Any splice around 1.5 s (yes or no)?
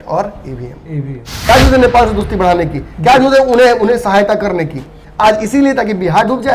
yes